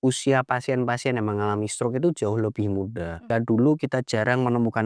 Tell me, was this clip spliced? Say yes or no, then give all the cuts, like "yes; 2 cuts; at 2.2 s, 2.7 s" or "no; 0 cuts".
yes; 1 cut; at 3.3 s